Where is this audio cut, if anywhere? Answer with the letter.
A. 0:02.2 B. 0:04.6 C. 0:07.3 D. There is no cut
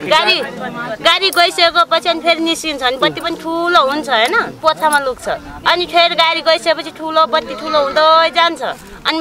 B